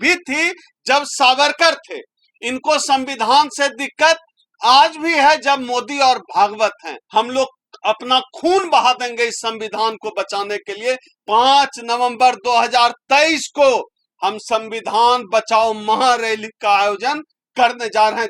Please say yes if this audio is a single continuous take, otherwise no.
no